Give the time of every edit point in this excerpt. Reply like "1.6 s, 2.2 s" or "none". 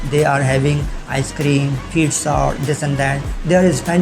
none